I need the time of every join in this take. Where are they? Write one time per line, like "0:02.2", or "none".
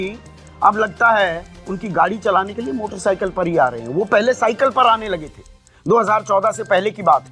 none